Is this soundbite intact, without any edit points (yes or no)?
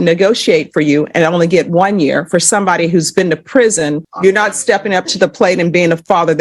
no